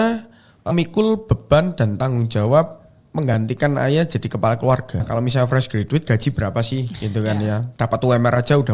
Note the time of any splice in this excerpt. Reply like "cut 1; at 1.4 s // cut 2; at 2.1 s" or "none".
cut 1; at 5.1 s // cut 2; at 7.7 s